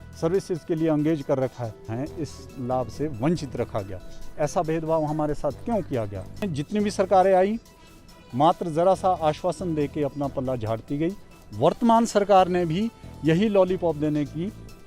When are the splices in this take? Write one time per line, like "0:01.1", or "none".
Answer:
0:01.9
0:06.5

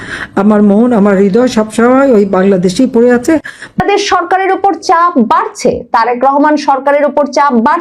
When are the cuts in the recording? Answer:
0:03.8

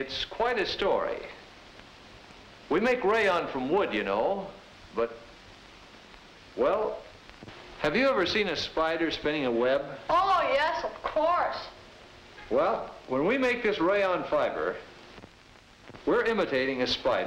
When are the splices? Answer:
0:06.8

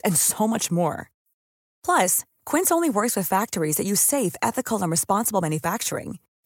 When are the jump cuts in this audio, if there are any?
none

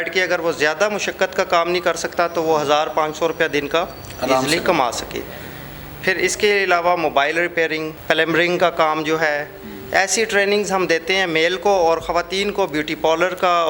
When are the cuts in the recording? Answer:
none

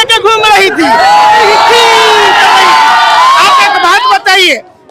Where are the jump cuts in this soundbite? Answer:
none

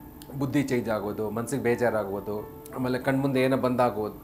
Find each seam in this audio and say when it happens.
0:02.6

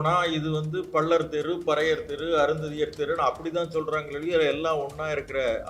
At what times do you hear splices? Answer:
none

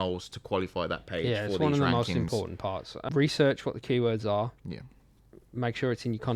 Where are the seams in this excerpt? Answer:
0:03.0

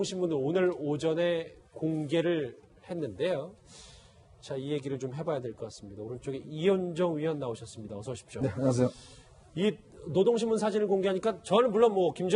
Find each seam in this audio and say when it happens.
0:08.7

